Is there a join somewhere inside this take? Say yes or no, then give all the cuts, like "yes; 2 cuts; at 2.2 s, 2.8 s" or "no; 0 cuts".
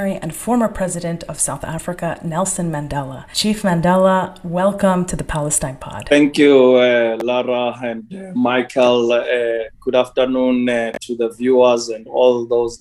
no; 0 cuts